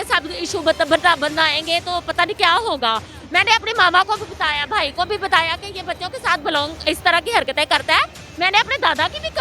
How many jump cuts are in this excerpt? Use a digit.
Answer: 0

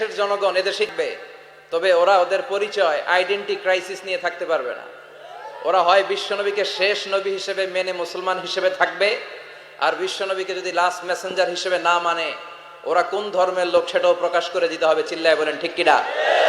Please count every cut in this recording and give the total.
1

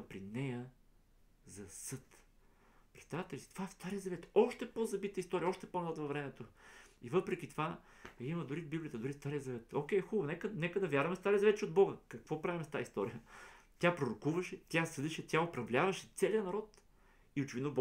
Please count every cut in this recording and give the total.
0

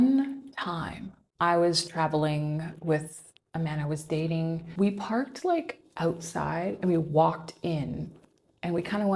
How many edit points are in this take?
2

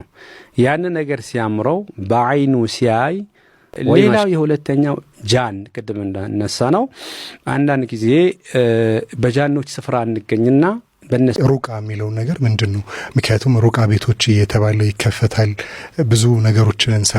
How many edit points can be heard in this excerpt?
2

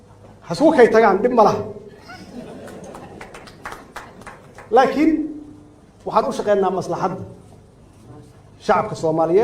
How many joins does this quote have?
1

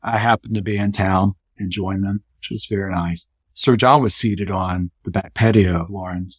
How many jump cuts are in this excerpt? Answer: 2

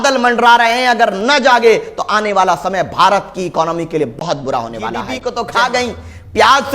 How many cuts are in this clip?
1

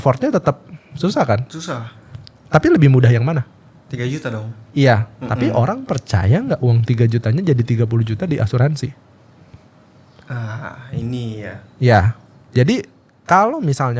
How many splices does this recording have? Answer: 0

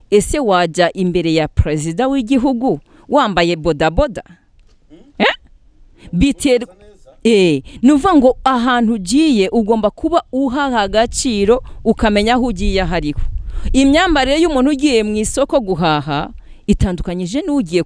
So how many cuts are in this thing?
0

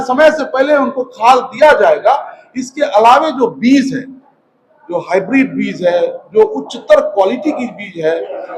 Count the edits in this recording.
0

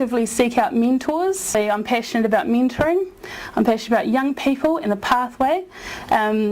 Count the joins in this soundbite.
1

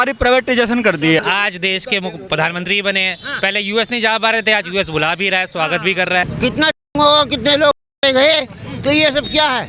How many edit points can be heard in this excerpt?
2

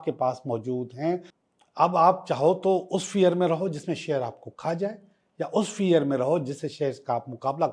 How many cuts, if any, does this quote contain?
1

